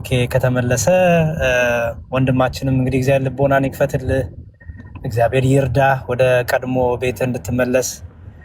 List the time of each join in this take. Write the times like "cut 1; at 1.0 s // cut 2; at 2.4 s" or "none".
none